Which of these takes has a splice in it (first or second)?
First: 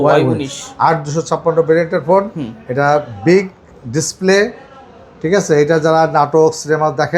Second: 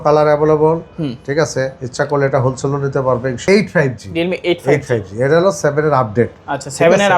second